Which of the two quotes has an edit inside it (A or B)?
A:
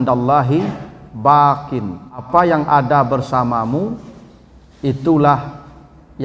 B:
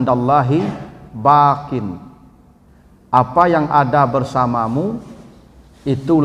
A